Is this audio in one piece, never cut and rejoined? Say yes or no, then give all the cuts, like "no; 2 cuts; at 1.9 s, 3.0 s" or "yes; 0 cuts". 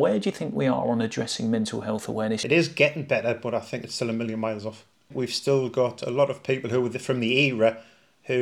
no; 2 cuts; at 2.4 s, 5.1 s